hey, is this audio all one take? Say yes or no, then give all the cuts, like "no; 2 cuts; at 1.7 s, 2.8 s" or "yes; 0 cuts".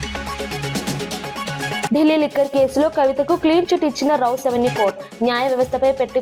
no; 1 cut; at 1.6 s